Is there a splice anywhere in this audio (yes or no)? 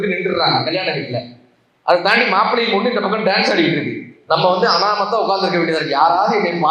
no